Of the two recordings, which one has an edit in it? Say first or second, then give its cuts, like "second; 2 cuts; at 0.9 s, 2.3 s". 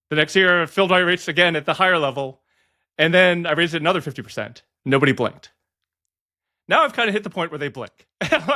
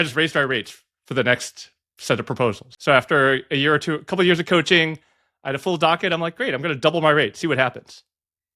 second; 1 cut; at 2.7 s